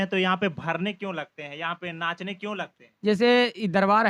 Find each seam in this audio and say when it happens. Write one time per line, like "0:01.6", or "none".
none